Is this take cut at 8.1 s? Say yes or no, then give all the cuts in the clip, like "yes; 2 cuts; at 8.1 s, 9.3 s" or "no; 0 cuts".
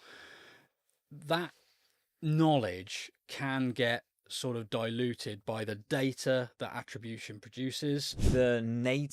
yes; 1 cut; at 8.1 s